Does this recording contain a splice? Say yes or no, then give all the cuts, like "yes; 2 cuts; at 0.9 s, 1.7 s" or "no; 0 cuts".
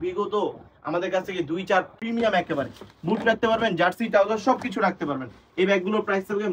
yes; 1 cut; at 1.9 s